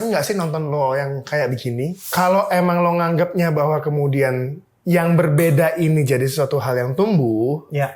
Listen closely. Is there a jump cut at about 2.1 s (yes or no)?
yes